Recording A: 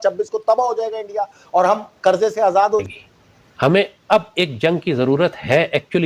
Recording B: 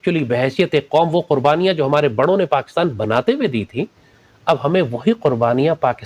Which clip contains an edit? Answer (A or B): A